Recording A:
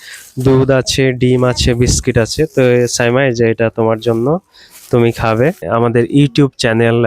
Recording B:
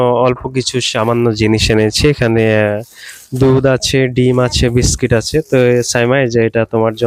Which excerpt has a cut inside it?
A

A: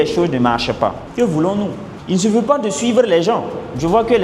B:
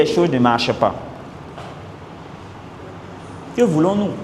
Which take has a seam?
A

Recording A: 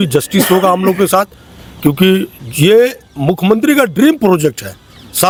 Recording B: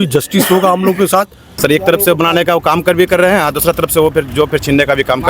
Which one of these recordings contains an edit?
B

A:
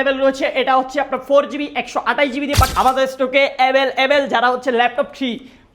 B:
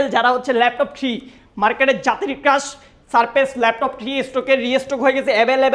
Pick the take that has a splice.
A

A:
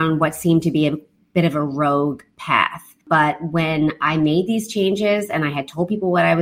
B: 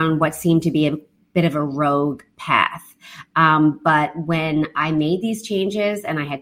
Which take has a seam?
A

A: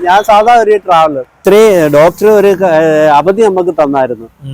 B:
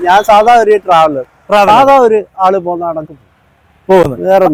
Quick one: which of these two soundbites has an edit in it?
A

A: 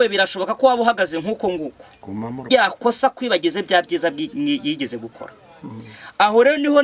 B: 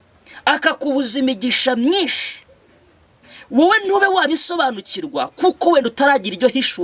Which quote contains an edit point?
A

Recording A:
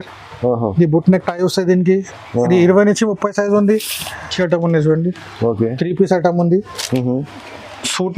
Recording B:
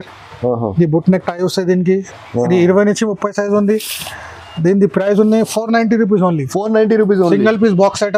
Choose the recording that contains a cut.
A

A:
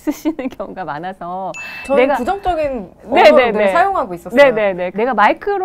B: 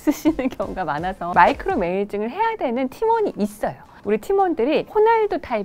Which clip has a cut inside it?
B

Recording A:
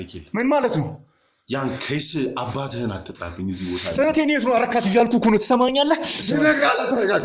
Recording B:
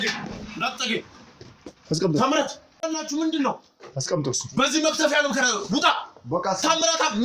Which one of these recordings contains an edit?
B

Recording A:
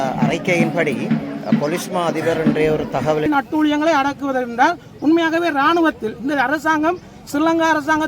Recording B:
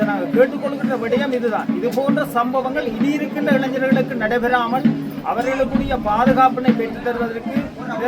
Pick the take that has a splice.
A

